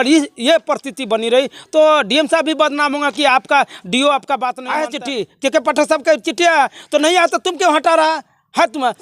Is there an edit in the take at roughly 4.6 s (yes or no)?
yes